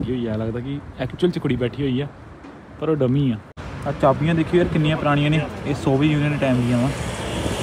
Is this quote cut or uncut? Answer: cut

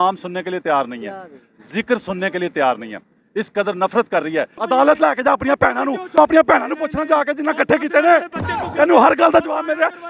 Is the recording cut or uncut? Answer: cut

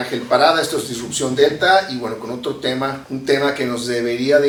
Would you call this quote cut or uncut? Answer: uncut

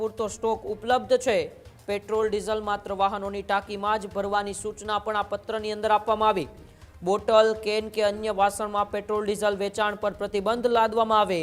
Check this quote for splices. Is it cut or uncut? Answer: uncut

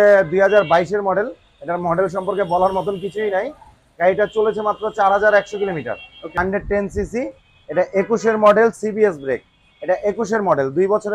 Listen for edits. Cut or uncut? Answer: cut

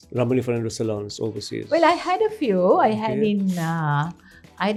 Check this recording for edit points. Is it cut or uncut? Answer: uncut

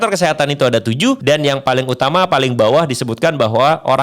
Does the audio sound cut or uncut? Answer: cut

